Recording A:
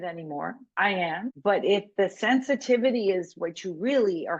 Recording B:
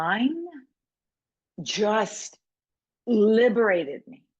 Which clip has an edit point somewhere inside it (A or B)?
A